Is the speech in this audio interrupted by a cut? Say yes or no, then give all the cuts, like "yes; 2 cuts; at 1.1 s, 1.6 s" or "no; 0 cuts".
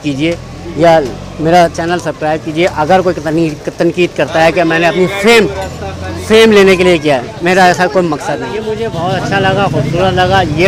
no; 0 cuts